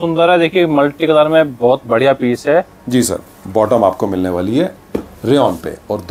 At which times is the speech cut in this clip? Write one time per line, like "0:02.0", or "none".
none